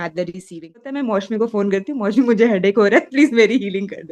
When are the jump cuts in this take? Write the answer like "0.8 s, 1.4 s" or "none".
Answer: 0.9 s